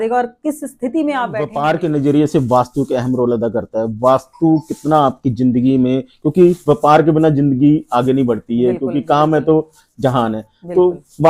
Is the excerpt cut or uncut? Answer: cut